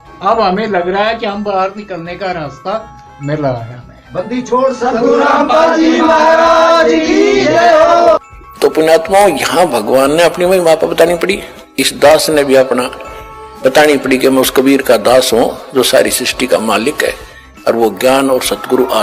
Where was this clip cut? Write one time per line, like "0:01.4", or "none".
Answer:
0:08.2